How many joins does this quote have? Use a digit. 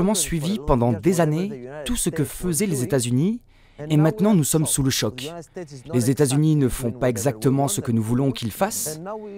0